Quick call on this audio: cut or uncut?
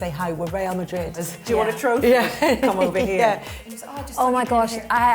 cut